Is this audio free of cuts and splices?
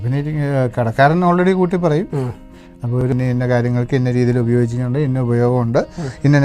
no; 1 cut; at 3.1 s

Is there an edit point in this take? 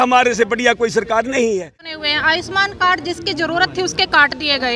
yes; 1 cut; at 1.9 s

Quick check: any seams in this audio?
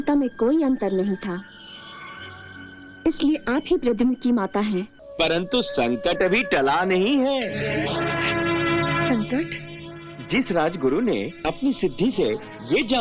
yes; 1 cut; at 5.0 s

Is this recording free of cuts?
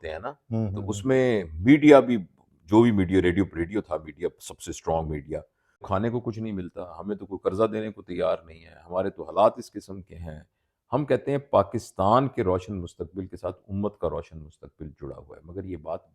no; 1 cut; at 5.8 s

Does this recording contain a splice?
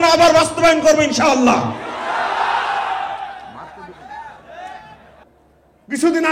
yes; 1 cut; at 5.2 s

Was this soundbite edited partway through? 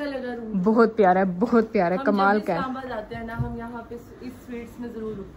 no; 0 cuts

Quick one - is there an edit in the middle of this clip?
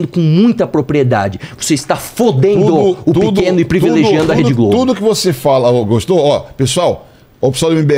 no; 0 cuts

